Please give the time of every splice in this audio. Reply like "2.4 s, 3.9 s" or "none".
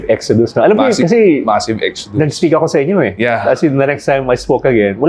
3.1 s